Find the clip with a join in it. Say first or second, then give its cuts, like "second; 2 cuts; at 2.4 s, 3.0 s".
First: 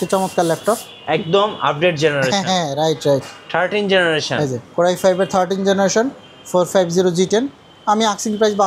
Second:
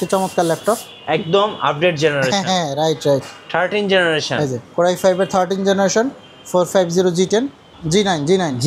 second; 1 cut; at 7.6 s